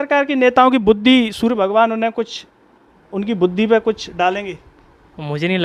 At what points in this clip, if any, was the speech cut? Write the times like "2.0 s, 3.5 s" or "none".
none